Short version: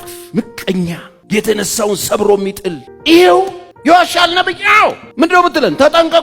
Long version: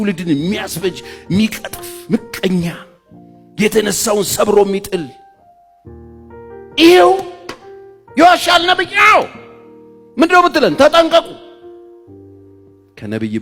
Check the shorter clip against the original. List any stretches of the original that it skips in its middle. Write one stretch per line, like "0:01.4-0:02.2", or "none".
0:02.8-0:03.4
0:05.2-0:06.6
0:07.4-0:08.0
0:09.4-0:10.0